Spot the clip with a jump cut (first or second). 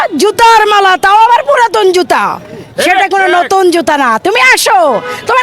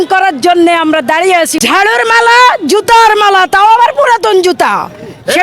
second